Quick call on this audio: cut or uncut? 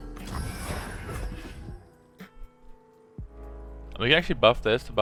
uncut